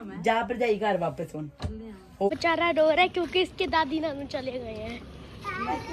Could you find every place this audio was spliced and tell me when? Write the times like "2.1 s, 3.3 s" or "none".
2.3 s